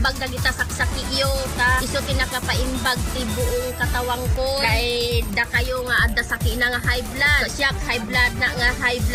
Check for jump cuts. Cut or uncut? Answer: uncut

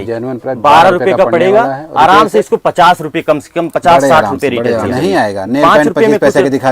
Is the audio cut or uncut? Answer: cut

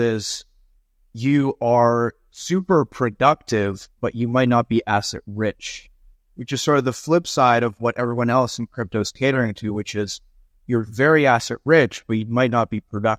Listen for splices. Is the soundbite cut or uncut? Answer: uncut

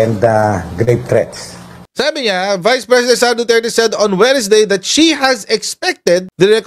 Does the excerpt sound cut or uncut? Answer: cut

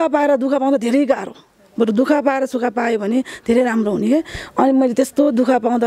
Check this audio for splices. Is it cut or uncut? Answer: uncut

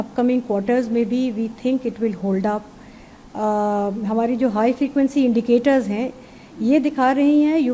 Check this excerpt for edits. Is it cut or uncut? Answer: uncut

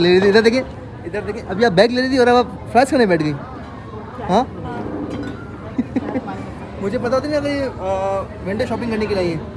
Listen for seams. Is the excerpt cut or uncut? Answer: uncut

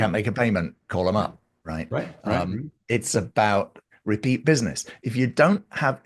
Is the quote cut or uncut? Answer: uncut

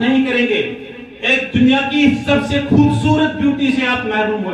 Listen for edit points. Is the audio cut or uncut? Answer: uncut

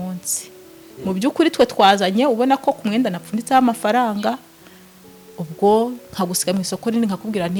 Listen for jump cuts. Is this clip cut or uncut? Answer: uncut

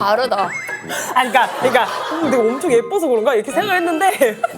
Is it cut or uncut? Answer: cut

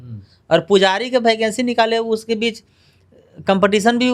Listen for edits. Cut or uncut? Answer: uncut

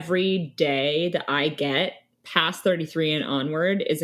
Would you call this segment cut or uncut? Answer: cut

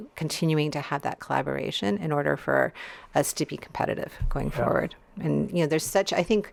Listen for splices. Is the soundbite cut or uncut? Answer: uncut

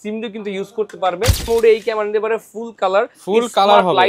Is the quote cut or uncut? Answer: cut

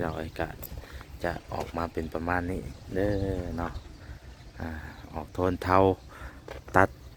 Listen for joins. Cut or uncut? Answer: uncut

